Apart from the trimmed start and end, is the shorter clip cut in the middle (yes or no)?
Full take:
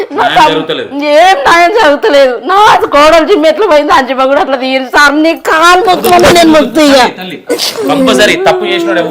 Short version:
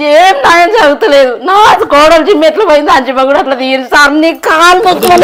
no